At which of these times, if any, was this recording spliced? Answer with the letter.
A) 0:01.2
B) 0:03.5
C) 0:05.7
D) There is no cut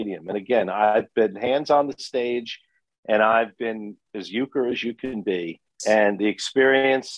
C